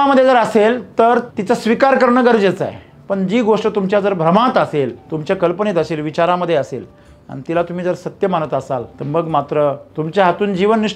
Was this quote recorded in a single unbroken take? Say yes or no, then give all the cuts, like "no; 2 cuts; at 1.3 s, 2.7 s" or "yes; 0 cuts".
no; 4 cuts; at 1.3 s, 5.1 s, 8.9 s, 9.9 s